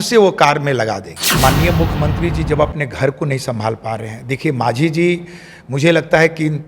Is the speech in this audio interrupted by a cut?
yes; 1 cut; at 1.3 s

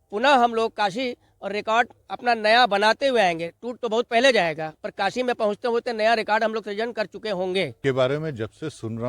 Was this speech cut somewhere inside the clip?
yes; 1 cut; at 7.8 s

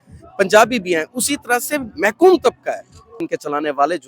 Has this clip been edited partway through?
yes; 1 cut; at 3.1 s

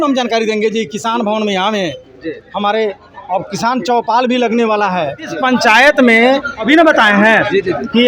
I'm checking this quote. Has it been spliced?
yes; 2 cuts; at 5.4 s, 6.7 s

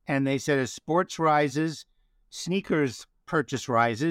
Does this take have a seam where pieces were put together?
no; 0 cuts

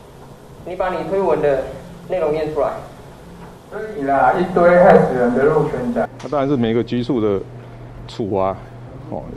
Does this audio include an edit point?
yes; 1 cut; at 6.2 s

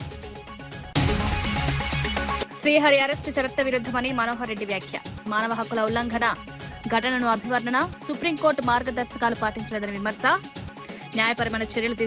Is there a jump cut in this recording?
yes; 2 cuts; at 0.9 s, 2.4 s

